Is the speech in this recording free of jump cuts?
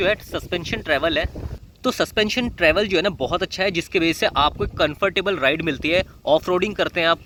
yes; 0 cuts

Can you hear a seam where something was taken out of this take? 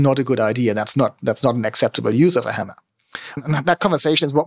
yes; 1 cut; at 3.2 s

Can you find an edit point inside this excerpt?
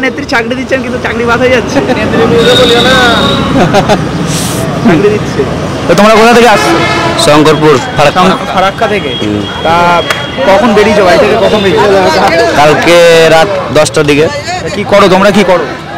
no; 0 cuts

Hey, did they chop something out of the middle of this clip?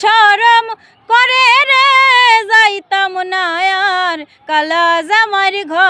no; 0 cuts

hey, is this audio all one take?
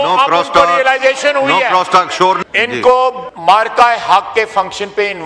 no; 2 cuts; at 2.4 s, 3.3 s

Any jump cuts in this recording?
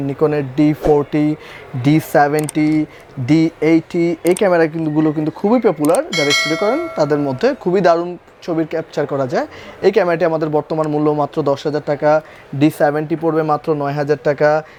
no; 0 cuts

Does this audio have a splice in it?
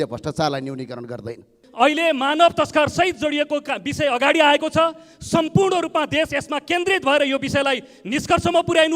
yes; 1 cut; at 1.6 s

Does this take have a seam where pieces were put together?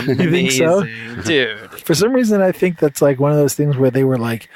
no; 0 cuts

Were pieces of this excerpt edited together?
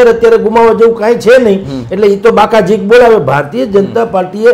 no; 0 cuts

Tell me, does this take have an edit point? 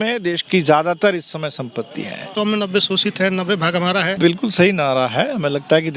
yes; 2 cuts; at 2.3 s, 4.1 s

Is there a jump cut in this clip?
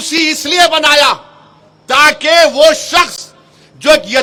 no; 0 cuts

